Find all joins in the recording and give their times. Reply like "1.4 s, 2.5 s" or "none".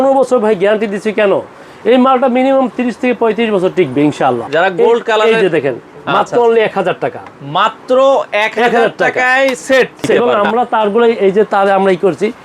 4.4 s, 10.2 s